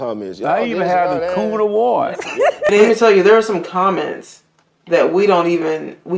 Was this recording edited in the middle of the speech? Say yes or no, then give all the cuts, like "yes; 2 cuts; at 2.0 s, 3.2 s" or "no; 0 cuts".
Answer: yes; 1 cut; at 2.7 s